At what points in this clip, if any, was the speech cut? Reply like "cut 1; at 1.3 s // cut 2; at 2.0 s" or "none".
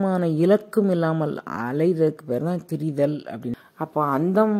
cut 1; at 3.6 s